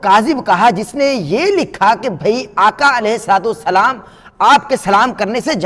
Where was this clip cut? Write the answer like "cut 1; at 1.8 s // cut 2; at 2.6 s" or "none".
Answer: none